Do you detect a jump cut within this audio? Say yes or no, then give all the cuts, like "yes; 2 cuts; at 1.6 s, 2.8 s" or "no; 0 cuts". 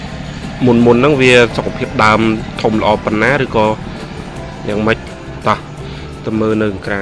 yes; 1 cut; at 5.0 s